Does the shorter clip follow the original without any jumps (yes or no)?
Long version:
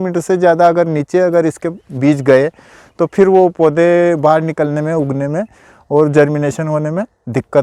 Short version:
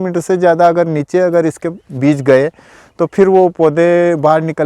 yes